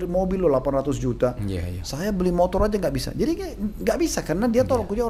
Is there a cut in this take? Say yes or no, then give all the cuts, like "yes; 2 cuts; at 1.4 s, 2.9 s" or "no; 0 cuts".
no; 0 cuts